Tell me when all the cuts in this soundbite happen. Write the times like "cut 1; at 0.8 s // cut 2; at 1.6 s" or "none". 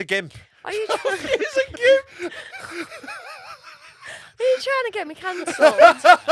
none

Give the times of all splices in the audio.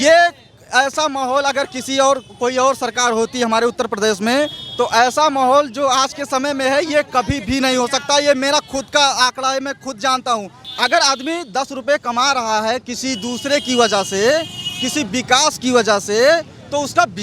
cut 1; at 10.6 s

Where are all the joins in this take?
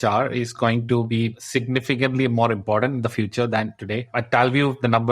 cut 1; at 1.2 s // cut 2; at 3.8 s

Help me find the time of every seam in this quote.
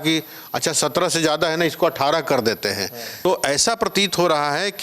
cut 1; at 3.2 s

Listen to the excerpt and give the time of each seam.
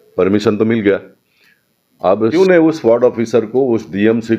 cut 1; at 2.3 s

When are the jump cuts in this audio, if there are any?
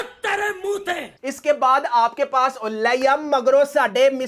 cut 1; at 1.1 s

